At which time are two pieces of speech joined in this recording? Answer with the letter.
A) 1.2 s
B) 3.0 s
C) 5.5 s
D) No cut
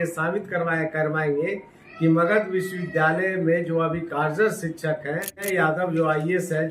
C